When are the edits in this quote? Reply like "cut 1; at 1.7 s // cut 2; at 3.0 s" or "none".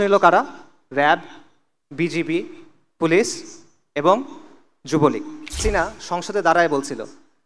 cut 1; at 5.6 s